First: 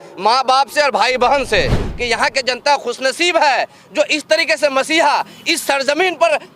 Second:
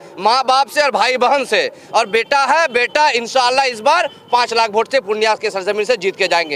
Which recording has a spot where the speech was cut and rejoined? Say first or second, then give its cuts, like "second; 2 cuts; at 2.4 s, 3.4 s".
first; 1 cut; at 1.9 s